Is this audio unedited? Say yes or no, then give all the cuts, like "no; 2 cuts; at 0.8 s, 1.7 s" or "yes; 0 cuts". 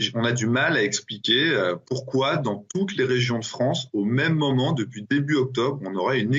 yes; 0 cuts